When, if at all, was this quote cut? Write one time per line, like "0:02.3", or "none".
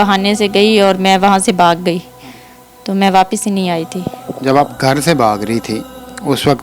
none